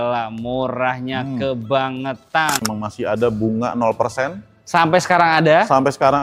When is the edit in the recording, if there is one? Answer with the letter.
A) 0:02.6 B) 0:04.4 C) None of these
A